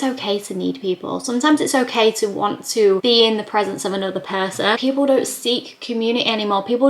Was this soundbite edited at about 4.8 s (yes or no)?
yes